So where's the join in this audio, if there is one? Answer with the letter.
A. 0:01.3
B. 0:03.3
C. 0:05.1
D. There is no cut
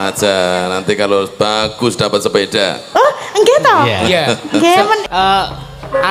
C